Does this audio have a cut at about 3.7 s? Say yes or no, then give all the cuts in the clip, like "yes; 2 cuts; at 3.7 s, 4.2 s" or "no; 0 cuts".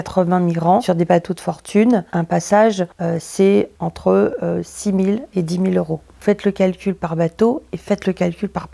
yes; 2 cuts; at 2.9 s, 3.7 s